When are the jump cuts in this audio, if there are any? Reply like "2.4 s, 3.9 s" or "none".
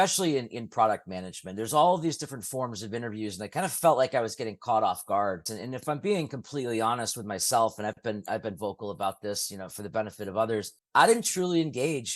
5.5 s